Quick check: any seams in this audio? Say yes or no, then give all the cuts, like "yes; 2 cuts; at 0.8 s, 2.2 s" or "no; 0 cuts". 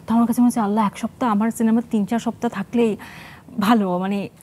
no; 0 cuts